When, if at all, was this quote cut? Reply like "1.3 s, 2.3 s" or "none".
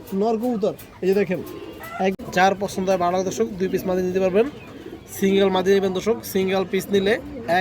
2.1 s